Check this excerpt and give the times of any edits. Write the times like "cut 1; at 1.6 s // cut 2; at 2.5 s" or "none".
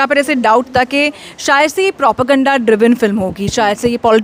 none